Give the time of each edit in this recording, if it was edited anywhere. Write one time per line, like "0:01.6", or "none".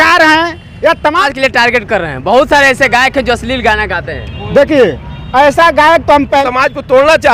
0:01.3
0:06.5